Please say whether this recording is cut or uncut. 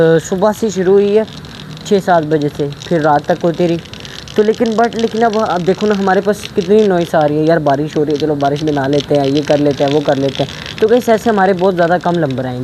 uncut